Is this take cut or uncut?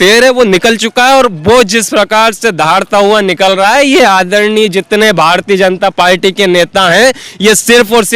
uncut